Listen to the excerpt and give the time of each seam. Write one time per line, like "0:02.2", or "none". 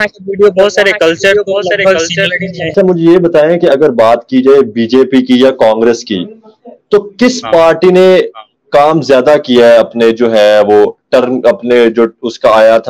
0:02.7